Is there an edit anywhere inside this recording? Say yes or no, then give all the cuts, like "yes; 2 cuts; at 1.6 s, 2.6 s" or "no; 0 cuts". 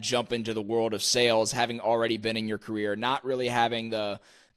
no; 0 cuts